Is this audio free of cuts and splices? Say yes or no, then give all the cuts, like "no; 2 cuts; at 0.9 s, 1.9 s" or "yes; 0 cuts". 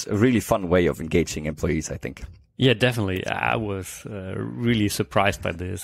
yes; 0 cuts